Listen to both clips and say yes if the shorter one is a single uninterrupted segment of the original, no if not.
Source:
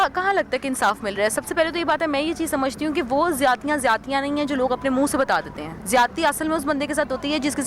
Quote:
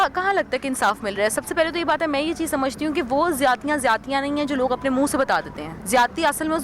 yes